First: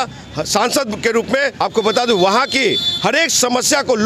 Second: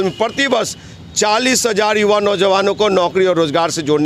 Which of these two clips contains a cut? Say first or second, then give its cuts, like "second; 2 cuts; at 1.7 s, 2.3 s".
first; 1 cut; at 1.5 s